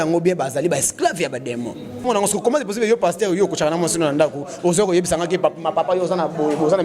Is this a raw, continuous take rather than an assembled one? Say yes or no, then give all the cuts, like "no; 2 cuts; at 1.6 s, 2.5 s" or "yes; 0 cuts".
no; 1 cut; at 2.1 s